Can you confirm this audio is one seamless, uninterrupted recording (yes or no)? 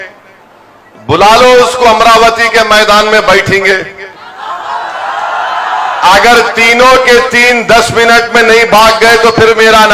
yes